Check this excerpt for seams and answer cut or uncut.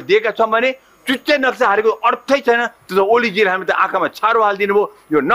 uncut